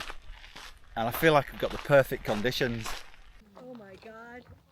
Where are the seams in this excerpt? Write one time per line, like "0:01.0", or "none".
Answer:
0:03.2